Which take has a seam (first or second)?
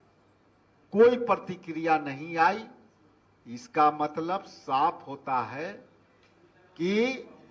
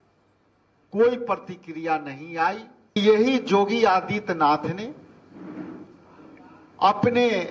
second